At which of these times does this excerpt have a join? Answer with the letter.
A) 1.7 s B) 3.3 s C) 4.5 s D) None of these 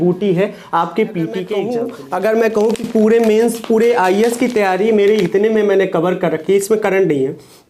A